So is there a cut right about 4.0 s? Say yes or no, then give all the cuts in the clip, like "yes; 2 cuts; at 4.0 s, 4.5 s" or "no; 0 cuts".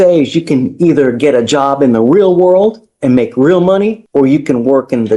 yes; 1 cut; at 4.0 s